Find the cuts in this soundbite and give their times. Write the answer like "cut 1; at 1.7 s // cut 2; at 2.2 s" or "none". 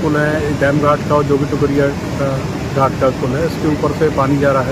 none